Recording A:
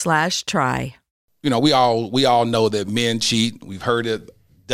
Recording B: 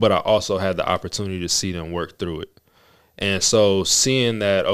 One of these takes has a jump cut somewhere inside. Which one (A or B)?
A